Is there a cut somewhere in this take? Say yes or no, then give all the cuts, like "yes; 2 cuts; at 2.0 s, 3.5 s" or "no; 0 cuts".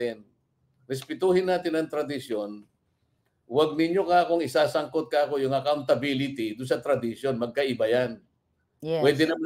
no; 0 cuts